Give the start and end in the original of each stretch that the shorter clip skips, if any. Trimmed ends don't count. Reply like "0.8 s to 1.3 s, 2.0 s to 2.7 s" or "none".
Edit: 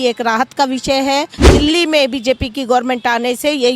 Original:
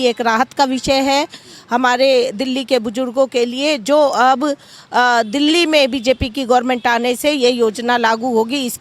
1.5 s to 5.3 s